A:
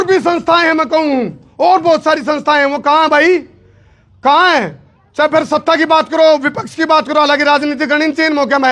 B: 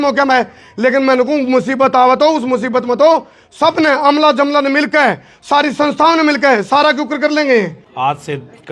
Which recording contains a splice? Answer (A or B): B